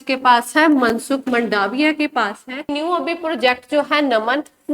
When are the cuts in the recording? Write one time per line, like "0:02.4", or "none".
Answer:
0:02.7